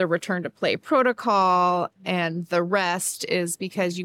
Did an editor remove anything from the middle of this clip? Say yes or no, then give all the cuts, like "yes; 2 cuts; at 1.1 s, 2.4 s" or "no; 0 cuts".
yes; 1 cut; at 2.0 s